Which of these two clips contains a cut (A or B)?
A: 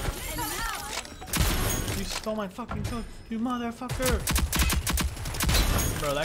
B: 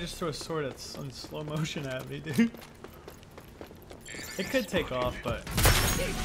A